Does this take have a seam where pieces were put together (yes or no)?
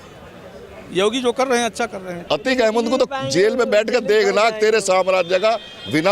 yes